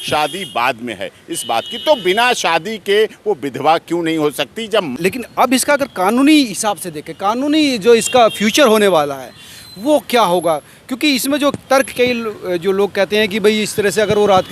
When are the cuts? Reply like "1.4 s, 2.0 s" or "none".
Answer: 5.0 s